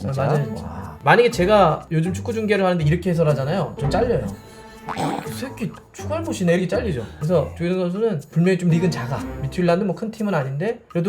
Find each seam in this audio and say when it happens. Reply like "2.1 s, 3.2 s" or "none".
0.9 s, 7.1 s